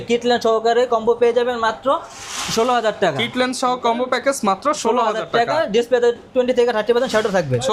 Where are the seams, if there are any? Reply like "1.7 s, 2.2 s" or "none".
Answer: none